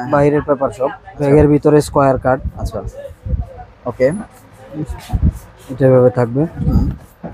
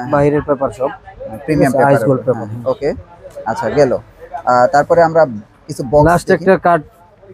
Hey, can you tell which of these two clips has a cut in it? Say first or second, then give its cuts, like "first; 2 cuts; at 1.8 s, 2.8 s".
first; 1 cut; at 1.1 s